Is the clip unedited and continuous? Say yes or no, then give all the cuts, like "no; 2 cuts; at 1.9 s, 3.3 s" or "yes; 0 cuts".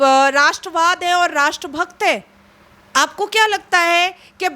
yes; 0 cuts